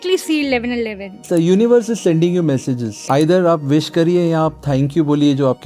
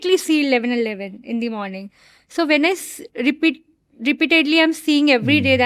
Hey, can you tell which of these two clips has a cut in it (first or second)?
first